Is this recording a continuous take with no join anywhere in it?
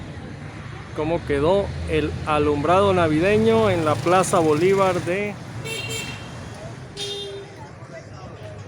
no; 2 cuts; at 5.4 s, 7.5 s

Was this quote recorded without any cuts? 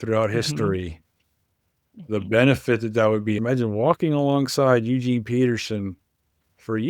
no; 1 cut; at 3.4 s

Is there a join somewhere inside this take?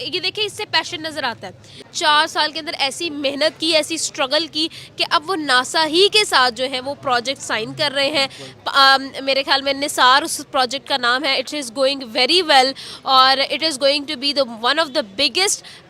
yes; 1 cut; at 1.9 s

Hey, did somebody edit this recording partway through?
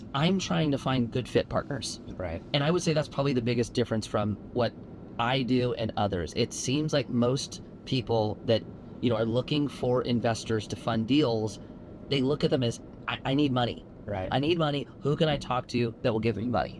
no; 0 cuts

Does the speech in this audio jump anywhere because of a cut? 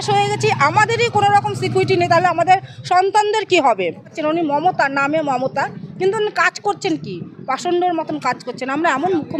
yes; 1 cut; at 4.2 s

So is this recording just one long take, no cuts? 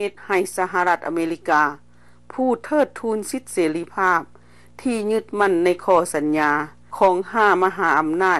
yes; 0 cuts

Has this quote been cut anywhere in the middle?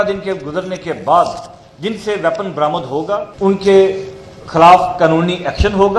yes; 1 cut; at 3.3 s

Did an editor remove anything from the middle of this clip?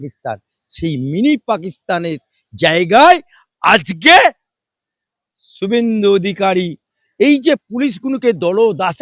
no; 0 cuts

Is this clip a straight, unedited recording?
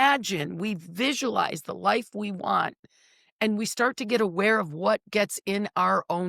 yes; 0 cuts

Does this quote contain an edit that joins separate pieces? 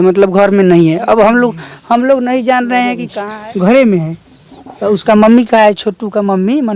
yes; 1 cut; at 3.0 s

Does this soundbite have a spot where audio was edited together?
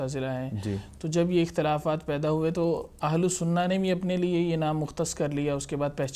no; 0 cuts

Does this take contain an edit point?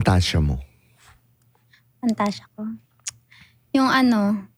no; 0 cuts

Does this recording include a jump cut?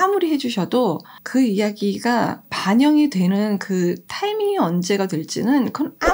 yes; 2 cuts; at 1.1 s, 2.5 s

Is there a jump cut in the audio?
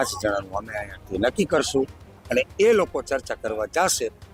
no; 0 cuts

